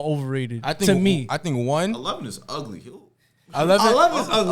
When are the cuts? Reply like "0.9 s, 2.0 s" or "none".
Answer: none